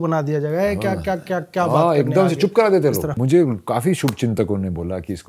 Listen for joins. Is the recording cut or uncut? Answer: cut